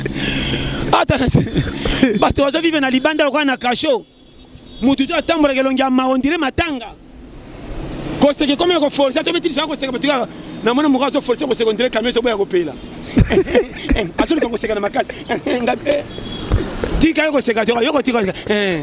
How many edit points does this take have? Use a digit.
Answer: 0